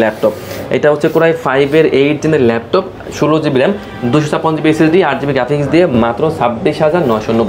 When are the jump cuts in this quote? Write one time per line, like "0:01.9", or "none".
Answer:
none